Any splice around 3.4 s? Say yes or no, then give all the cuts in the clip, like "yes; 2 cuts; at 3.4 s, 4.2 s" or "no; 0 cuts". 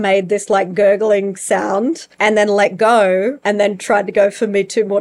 yes; 2 cuts; at 2.1 s, 3.4 s